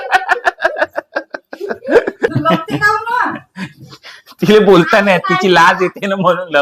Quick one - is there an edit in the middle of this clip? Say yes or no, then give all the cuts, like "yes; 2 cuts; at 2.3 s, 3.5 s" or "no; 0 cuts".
yes; 1 cut; at 2.3 s